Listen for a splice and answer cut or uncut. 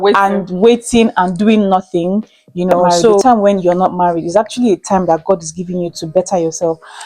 cut